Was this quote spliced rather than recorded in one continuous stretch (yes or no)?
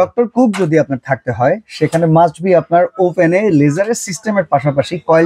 no